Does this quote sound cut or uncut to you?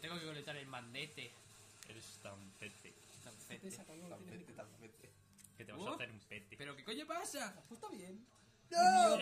cut